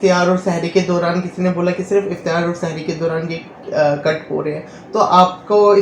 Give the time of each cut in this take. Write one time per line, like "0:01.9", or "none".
none